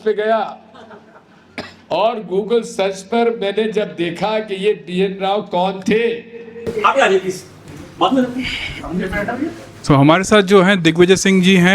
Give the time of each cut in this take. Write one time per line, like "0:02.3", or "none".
0:06.6